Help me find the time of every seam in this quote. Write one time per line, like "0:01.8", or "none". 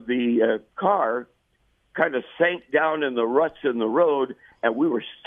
none